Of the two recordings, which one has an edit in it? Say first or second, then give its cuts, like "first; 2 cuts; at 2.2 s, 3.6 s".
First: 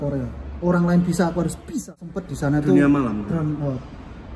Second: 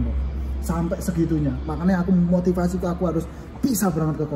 first; 1 cut; at 2.2 s